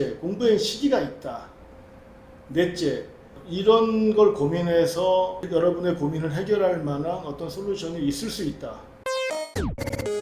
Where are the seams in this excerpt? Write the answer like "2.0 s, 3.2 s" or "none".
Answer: 9.1 s